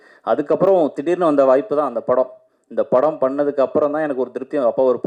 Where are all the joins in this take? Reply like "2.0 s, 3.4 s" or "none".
none